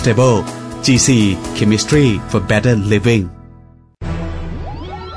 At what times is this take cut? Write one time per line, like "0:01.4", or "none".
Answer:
0:03.9